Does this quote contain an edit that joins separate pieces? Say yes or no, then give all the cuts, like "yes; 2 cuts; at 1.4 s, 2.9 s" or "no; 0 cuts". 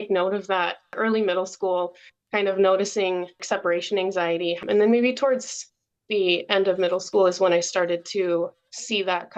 yes; 4 cuts; at 0.9 s, 3.4 s, 4.6 s, 7.1 s